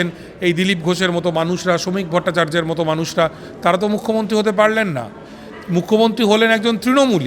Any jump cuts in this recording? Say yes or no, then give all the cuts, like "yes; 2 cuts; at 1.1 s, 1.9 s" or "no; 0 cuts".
no; 0 cuts